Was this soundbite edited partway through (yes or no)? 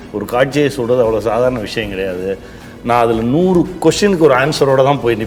no